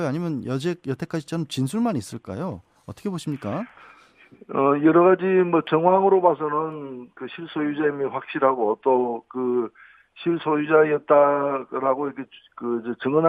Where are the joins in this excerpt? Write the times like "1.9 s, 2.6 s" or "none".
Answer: 2.3 s